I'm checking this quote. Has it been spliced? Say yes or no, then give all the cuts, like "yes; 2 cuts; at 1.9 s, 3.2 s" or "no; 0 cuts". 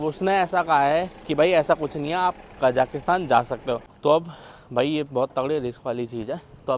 yes; 1 cut; at 3.9 s